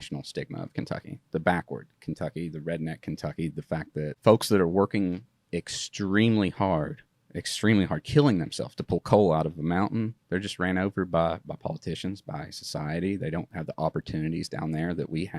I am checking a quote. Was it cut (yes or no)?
yes